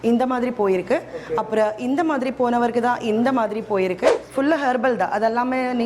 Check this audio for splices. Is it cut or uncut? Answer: cut